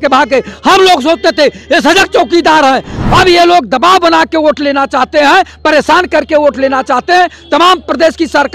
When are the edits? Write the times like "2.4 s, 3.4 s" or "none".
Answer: 2.9 s